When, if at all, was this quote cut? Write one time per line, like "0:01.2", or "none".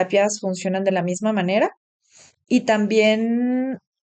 none